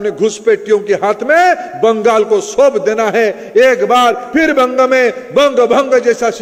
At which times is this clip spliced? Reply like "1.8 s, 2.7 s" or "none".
none